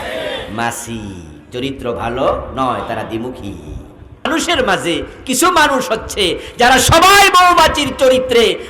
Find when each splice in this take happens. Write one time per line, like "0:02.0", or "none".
0:04.3